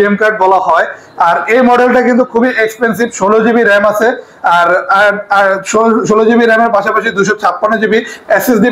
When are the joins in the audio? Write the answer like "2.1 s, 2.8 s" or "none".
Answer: none